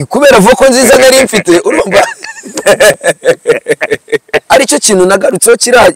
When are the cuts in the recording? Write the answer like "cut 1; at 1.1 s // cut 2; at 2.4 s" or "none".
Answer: cut 1; at 4.4 s